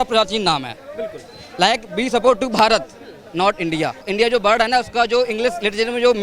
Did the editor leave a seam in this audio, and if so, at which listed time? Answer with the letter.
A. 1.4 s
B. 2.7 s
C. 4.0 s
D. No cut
C